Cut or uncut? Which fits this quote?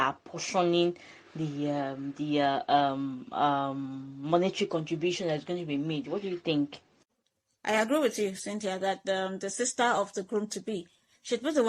uncut